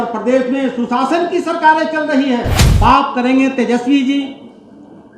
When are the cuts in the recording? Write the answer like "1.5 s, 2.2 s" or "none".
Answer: 2.6 s